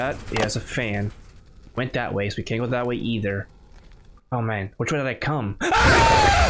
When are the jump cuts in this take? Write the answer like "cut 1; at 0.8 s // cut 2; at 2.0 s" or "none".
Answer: none